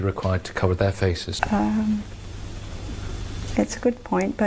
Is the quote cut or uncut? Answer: cut